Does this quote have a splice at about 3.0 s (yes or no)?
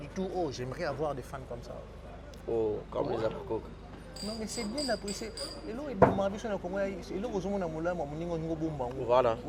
no